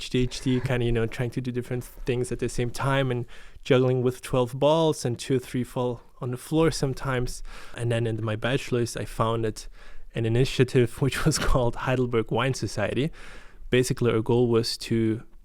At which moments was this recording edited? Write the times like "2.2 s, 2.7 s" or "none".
7.7 s